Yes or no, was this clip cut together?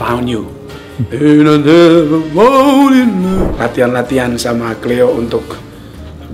yes